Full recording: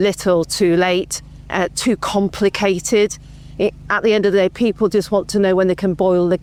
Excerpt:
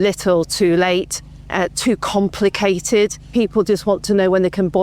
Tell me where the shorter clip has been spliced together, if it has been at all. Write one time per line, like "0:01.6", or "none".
0:03.3